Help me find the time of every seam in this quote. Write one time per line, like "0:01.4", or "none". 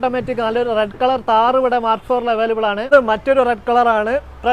0:02.9